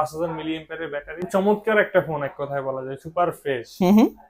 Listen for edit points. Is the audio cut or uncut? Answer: cut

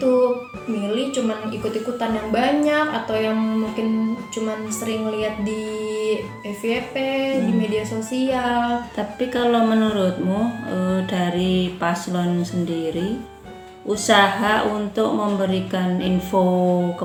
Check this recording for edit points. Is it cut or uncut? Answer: uncut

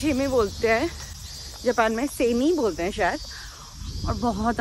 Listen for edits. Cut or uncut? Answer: uncut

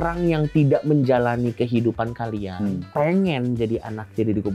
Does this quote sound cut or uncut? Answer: uncut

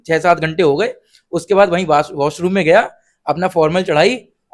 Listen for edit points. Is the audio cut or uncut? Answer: uncut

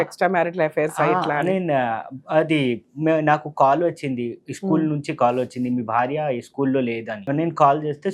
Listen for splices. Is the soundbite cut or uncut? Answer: cut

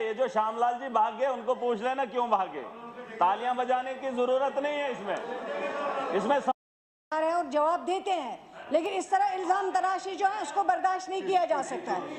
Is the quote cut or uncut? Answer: uncut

